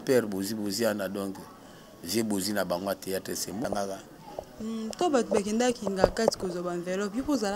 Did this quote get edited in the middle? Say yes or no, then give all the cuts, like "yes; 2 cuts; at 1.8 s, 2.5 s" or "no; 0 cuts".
yes; 1 cut; at 3.6 s